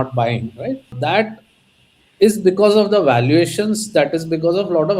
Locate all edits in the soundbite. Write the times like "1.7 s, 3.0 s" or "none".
0.9 s